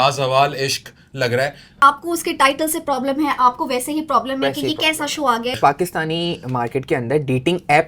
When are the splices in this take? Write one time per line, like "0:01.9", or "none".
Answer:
0:01.8
0:05.6